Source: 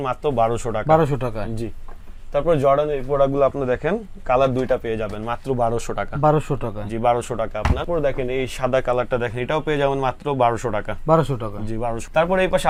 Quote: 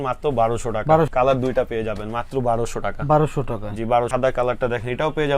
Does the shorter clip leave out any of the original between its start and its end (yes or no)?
yes